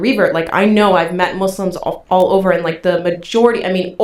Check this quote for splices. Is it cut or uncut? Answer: uncut